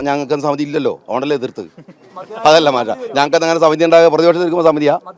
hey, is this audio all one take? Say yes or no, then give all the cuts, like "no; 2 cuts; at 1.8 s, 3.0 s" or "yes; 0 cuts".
yes; 0 cuts